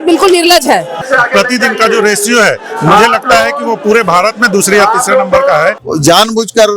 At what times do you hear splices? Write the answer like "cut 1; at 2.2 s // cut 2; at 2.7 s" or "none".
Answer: cut 1; at 1.0 s // cut 2; at 5.8 s